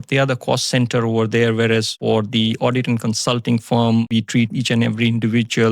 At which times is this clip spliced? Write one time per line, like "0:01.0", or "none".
0:02.0
0:04.0